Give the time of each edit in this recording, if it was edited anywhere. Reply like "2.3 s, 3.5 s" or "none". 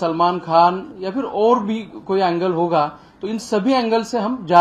none